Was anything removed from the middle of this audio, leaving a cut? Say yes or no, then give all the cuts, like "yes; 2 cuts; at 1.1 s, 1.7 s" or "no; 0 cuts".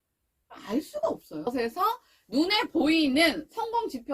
yes; 1 cut; at 1.5 s